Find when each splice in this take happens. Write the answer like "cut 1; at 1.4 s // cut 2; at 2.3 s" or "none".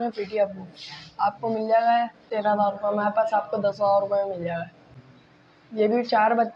cut 1; at 2.2 s // cut 2; at 4.7 s